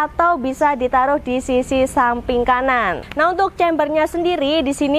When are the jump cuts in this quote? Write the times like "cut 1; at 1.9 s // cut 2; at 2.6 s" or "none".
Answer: cut 1; at 3.0 s